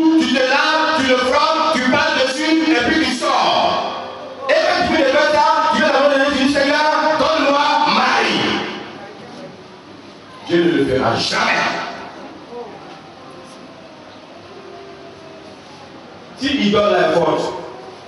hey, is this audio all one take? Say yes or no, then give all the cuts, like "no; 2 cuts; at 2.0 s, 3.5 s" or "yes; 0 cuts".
yes; 0 cuts